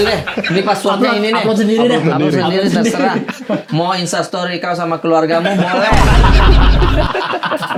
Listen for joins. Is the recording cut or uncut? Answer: uncut